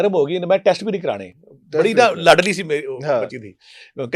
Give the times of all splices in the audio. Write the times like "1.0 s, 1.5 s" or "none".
none

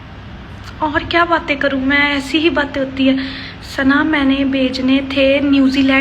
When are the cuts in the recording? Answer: none

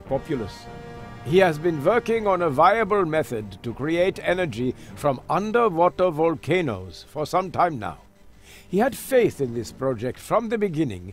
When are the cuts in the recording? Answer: 9.6 s

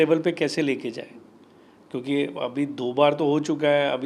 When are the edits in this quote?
none

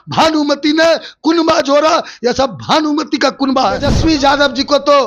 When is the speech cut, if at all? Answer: 3.9 s

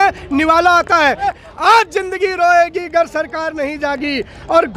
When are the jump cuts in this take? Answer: 1.3 s

